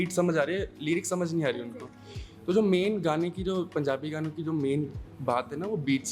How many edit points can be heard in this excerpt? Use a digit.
0